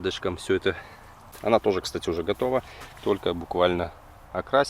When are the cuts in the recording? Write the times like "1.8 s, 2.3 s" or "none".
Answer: 1.3 s